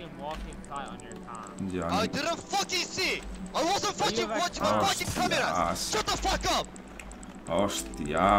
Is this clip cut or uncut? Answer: uncut